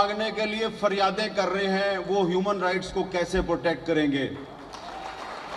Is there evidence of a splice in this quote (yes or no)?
no